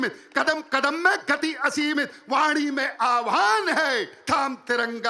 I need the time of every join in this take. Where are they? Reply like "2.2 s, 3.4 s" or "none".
none